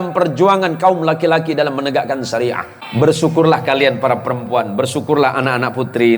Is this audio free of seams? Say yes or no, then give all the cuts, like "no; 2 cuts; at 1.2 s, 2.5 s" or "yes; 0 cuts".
no; 1 cut; at 2.7 s